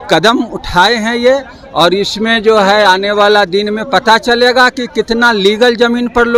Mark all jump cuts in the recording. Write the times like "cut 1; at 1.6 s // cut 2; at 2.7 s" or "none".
none